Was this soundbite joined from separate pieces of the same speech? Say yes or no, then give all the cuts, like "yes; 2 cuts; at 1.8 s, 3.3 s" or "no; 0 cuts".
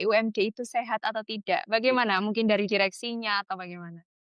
no; 0 cuts